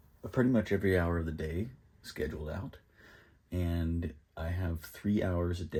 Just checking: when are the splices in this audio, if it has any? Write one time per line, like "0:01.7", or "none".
none